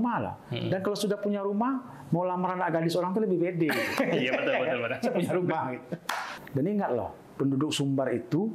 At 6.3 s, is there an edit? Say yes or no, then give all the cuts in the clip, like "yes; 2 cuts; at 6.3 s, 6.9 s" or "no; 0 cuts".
yes; 1 cut; at 6.3 s